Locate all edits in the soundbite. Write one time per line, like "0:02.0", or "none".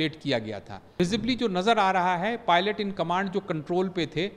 0:01.0